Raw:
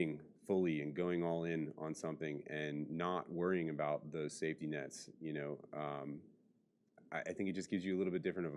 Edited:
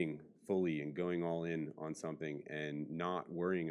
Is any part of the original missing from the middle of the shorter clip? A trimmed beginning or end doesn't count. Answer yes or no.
no